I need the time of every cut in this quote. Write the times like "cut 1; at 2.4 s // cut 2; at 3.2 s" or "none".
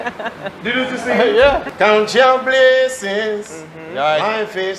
cut 1; at 1.7 s